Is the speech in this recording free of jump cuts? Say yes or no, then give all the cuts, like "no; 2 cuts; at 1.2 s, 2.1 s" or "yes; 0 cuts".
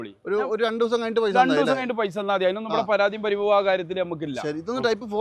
yes; 0 cuts